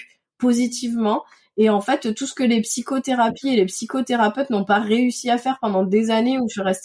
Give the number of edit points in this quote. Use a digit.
0